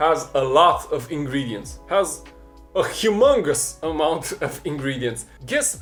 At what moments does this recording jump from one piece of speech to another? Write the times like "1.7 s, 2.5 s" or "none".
none